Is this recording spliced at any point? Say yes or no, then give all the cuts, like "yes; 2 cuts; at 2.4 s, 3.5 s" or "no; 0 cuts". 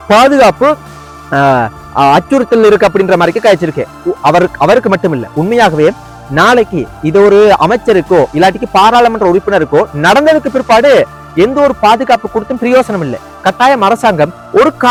no; 0 cuts